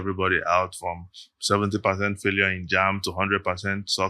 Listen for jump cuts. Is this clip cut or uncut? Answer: uncut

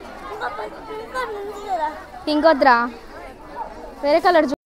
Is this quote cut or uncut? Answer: uncut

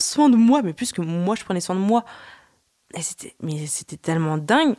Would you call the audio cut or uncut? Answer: uncut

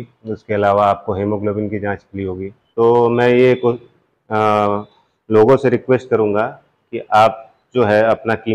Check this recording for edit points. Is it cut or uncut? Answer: cut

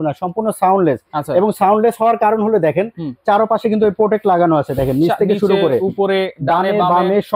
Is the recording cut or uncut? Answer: uncut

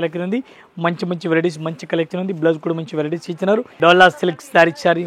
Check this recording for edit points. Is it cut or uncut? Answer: cut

